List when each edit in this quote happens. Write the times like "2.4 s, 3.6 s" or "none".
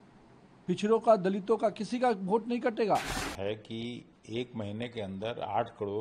3.2 s